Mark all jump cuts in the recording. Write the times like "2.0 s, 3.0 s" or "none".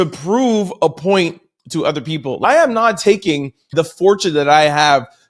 2.4 s, 3.7 s